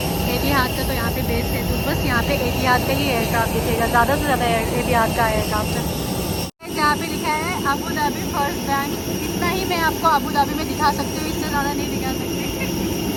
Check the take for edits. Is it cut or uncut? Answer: uncut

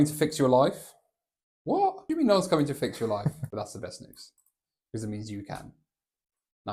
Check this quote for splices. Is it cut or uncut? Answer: cut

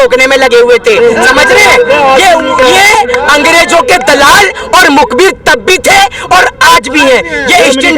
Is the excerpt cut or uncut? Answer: uncut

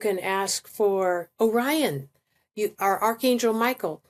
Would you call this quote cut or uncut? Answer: uncut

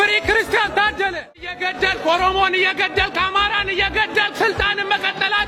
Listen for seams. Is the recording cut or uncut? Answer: cut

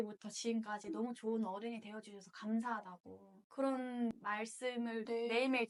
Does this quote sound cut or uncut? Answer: uncut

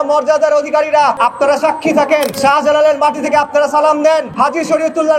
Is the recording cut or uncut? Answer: cut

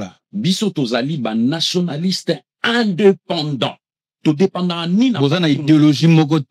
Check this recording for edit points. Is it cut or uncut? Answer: uncut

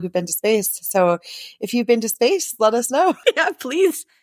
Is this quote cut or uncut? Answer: cut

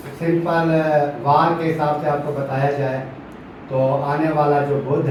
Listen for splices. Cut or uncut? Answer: uncut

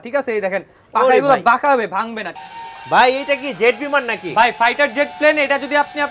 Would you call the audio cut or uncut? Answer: cut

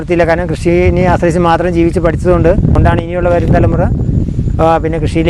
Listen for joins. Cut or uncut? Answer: cut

